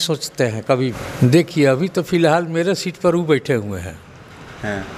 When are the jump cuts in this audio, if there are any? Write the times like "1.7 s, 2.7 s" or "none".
1.0 s